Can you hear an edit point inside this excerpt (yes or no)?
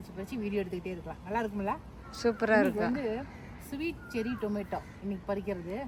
no